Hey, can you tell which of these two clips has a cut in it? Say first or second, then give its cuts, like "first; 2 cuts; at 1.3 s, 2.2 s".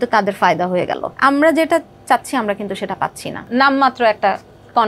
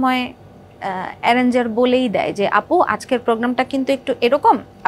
first; 2 cuts; at 1.1 s, 3.5 s